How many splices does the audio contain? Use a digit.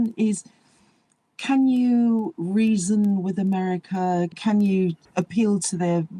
2